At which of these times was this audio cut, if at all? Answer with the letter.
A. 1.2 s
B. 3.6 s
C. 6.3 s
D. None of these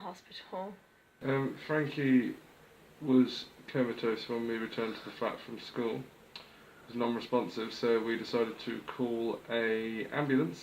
A